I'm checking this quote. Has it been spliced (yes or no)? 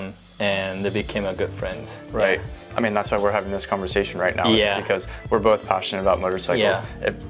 yes